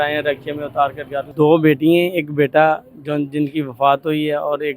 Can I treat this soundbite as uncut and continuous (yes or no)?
no